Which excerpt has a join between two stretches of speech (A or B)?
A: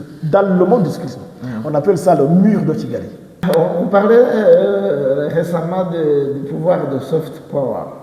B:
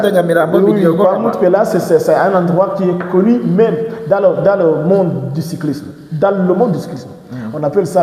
A